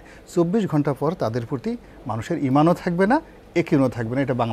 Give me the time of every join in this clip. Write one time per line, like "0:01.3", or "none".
none